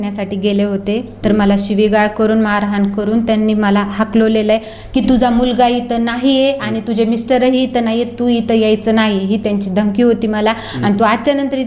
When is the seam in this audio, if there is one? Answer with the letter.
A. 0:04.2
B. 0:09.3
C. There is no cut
C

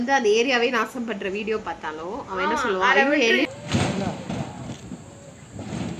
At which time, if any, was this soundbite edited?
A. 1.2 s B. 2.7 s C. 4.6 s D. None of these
D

